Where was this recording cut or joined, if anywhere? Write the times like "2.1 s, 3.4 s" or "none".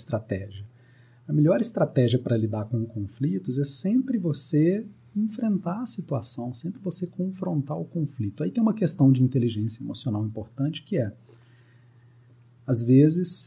none